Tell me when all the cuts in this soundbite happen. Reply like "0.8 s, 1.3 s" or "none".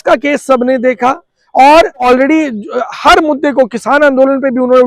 2.0 s